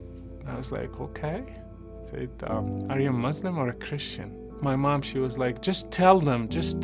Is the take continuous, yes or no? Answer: no